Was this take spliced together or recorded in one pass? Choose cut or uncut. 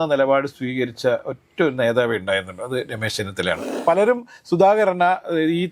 cut